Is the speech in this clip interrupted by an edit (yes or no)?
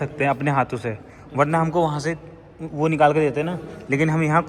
no